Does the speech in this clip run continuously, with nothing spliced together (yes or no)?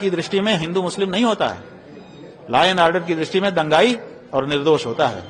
yes